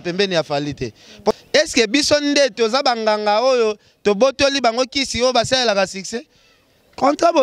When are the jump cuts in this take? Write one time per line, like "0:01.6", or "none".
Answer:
0:01.3